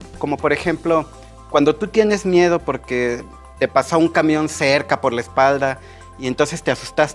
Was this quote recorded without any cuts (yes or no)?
no